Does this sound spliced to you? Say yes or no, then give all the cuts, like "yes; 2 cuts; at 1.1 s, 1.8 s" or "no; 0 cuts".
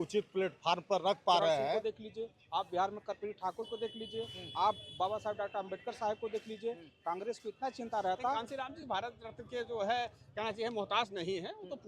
yes; 2 cuts; at 1.8 s, 8.4 s